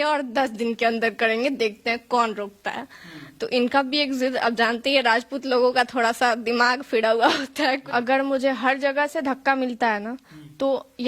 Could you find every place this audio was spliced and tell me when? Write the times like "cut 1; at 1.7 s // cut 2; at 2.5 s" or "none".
cut 1; at 7.9 s